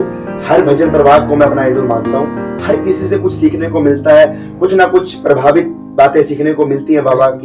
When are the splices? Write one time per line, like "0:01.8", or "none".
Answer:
0:02.6